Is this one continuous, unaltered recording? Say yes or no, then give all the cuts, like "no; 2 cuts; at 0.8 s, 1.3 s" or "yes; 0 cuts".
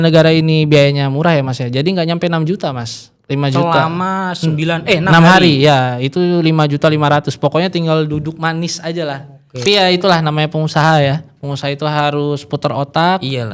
no; 1 cut; at 9.6 s